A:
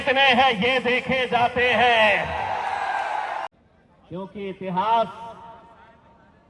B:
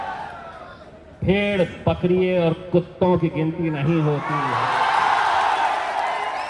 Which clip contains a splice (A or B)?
A